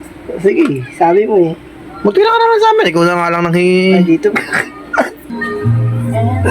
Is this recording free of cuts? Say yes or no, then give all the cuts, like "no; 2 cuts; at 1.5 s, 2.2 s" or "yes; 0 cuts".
no; 1 cut; at 5.3 s